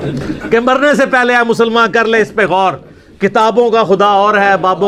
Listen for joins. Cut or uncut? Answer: uncut